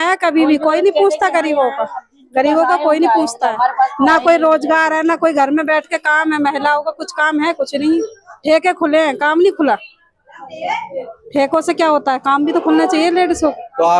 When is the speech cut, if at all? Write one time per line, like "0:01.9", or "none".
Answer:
none

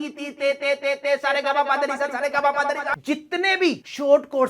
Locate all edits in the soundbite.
0:03.0

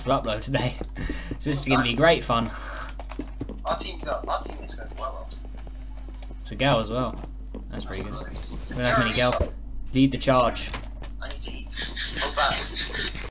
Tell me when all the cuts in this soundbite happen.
none

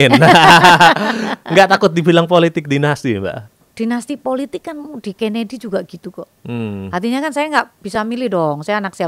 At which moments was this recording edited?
0:03.6

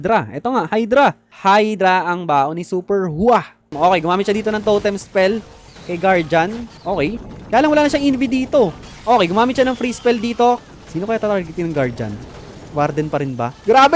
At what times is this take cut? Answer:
0:01.3
0:03.7
0:06.7
0:10.6

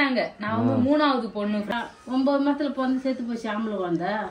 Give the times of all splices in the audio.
0:01.7

